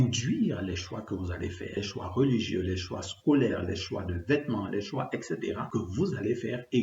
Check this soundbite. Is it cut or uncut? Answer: cut